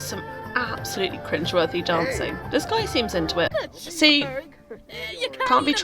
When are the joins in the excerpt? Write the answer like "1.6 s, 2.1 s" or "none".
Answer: 3.5 s

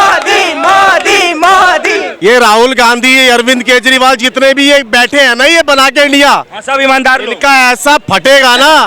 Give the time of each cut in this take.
2.1 s

